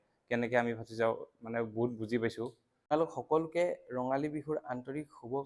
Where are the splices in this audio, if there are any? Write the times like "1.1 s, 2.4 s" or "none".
2.9 s